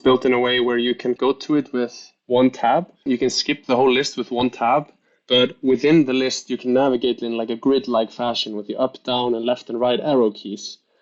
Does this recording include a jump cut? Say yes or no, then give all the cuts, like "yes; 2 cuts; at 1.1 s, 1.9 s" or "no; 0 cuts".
yes; 2 cuts; at 1.2 s, 3.1 s